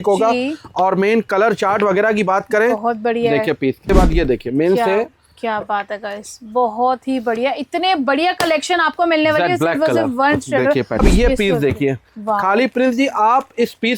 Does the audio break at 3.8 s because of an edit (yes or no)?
yes